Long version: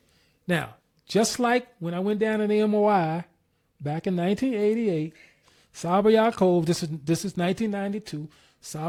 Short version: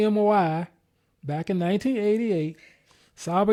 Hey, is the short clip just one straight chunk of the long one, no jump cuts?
yes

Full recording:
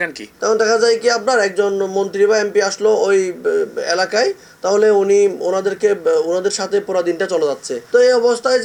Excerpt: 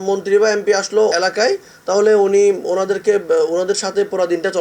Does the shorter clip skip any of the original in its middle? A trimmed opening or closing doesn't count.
yes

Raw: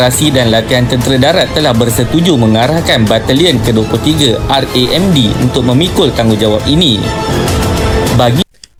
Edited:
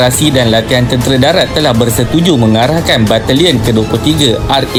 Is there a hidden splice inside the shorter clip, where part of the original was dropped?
no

